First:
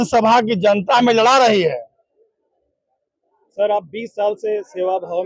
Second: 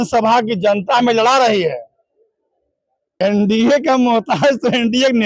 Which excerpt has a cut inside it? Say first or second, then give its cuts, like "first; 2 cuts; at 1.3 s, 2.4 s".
second; 1 cut; at 3.2 s